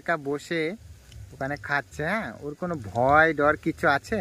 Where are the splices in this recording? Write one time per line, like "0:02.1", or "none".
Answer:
none